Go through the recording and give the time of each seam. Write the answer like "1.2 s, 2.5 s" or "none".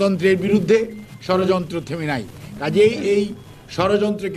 none